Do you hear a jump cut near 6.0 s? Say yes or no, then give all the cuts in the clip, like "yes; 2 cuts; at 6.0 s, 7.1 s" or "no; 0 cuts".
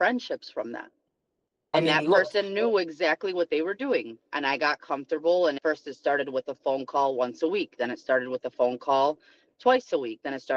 no; 1 cut; at 1.7 s